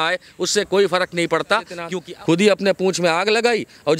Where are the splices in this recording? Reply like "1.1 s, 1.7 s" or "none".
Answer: 1.8 s